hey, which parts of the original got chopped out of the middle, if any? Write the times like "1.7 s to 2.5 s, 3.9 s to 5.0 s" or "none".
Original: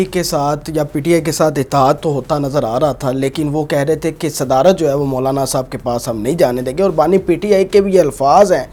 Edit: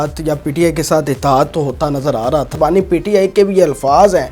3.0 s to 6.9 s